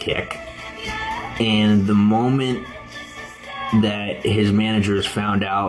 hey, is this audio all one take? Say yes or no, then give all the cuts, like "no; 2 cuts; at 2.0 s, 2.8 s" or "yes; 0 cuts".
no; 1 cut; at 1.3 s